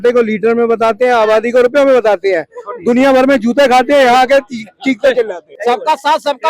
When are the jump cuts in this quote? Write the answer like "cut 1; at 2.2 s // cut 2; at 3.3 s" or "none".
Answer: cut 1; at 5.5 s